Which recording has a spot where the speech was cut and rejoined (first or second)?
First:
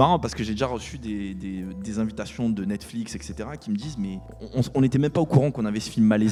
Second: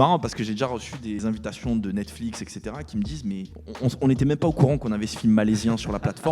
second